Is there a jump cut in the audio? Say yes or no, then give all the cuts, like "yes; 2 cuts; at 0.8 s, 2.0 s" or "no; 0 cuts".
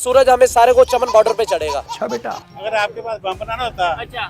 yes; 1 cut; at 2.3 s